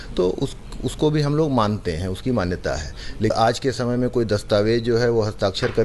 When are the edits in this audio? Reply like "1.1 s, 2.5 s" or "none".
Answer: 3.3 s